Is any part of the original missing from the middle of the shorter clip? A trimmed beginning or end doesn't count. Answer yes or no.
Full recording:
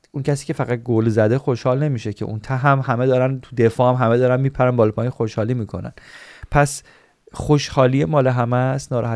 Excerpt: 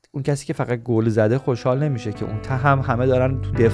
no